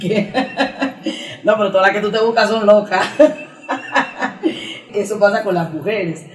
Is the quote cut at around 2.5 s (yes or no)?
no